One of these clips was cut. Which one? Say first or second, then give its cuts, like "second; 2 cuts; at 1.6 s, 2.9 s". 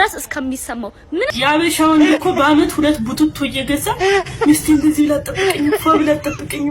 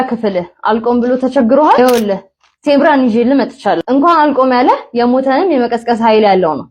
first; 1 cut; at 1.3 s